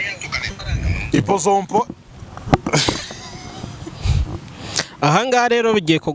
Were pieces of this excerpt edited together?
no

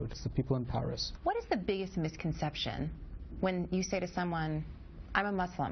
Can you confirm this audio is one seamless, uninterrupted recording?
no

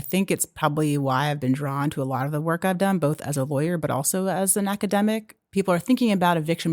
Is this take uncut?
no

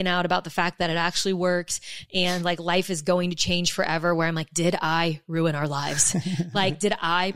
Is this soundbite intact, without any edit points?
yes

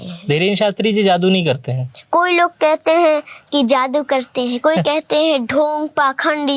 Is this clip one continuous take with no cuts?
yes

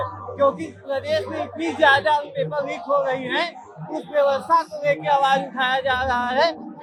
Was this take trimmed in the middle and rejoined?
no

